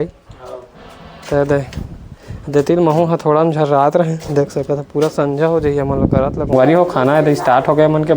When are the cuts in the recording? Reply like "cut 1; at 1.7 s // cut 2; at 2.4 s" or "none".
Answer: cut 1; at 6.5 s